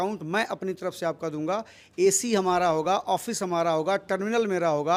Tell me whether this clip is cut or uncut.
uncut